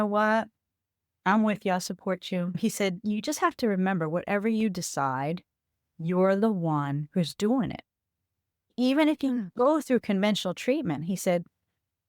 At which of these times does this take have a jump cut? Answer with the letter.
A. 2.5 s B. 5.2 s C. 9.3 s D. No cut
A